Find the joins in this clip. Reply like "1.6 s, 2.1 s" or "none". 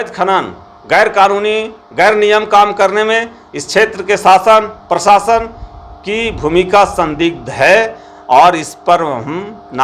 none